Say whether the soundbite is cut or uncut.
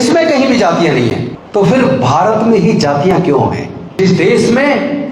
cut